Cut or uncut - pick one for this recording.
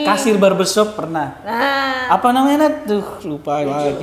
uncut